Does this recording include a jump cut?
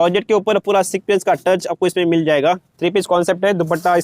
yes; 1 cut; at 2.7 s

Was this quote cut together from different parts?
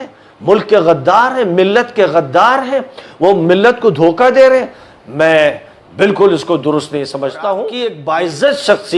yes; 1 cut; at 8.0 s

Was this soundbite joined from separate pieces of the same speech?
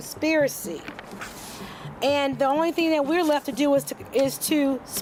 no; 0 cuts

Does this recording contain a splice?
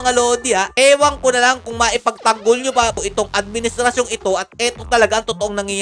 no; 0 cuts

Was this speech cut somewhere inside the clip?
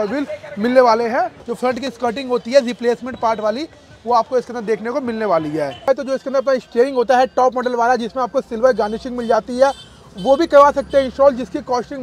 yes; 2 cuts; at 1.4 s, 5.9 s

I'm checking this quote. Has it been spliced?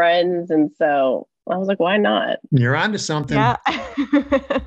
yes; 2 cuts; at 2.4 s, 3.4 s

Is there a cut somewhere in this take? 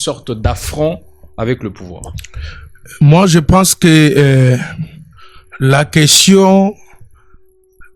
no; 0 cuts

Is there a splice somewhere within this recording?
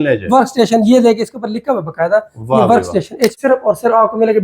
yes; 1 cut; at 3.4 s

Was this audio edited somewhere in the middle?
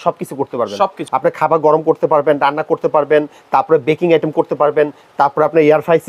yes; 1 cut; at 1.0 s

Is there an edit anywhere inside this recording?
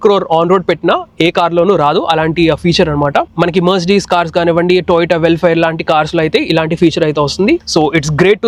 no; 0 cuts

